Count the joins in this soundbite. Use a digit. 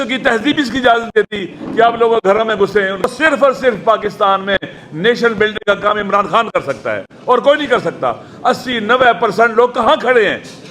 1